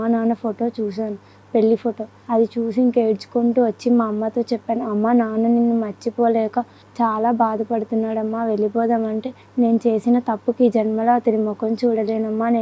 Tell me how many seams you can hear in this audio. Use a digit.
3